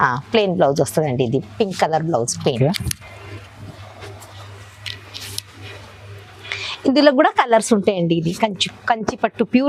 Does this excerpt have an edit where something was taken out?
no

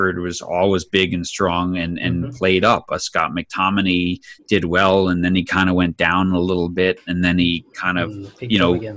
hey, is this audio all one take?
yes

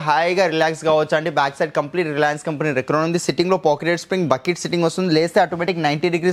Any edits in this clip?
no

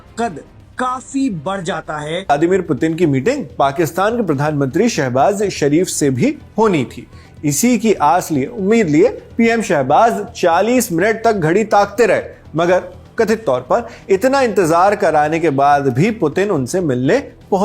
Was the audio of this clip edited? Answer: yes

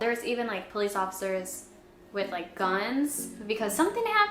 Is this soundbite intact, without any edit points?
yes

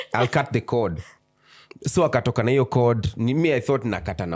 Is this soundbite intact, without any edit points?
yes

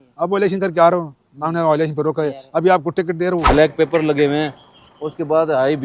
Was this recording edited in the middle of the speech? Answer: yes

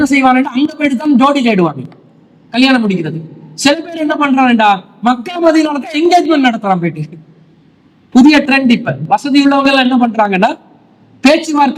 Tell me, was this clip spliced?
no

